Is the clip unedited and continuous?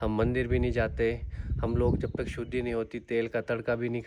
yes; 0 cuts

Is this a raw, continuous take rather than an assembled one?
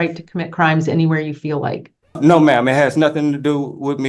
no; 1 cut; at 2.2 s

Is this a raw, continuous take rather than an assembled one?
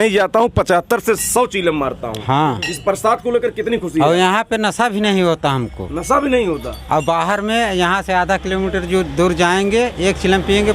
yes; 0 cuts

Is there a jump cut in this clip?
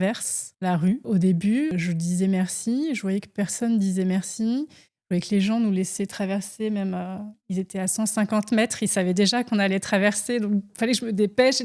yes; 2 cuts; at 0.9 s, 1.7 s

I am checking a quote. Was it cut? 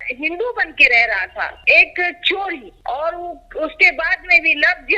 yes; 1 cut; at 1.6 s

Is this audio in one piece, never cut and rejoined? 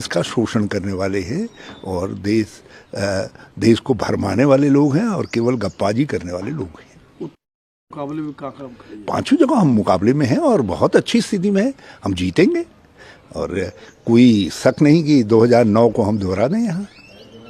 yes; 0 cuts

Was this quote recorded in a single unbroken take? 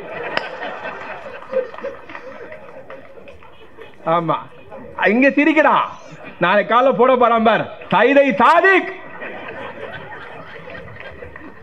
yes; 0 cuts

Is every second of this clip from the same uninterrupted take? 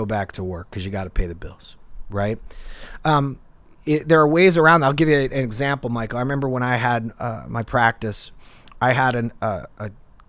yes; 0 cuts

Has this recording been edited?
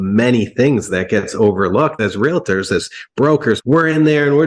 yes; 1 cut; at 2.0 s

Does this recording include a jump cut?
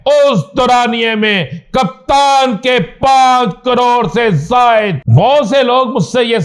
yes; 1 cut; at 5.0 s

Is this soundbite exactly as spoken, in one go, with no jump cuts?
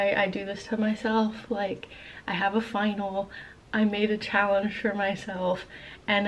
yes; 0 cuts

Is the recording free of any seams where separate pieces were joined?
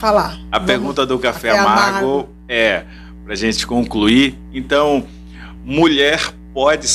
yes; 0 cuts

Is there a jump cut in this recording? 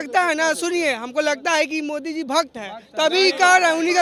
no; 0 cuts

